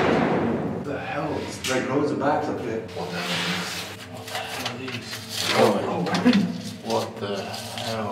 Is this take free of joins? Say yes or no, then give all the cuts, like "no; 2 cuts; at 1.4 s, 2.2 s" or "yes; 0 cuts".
no; 3 cuts; at 0.8 s, 2.8 s, 4.0 s